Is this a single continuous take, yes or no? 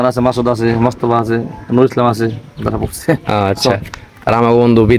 yes